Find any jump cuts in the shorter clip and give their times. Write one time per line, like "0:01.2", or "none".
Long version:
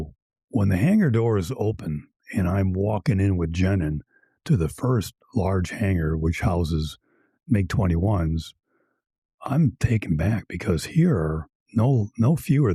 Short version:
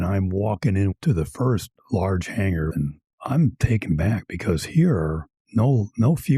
0:00.9
0:02.7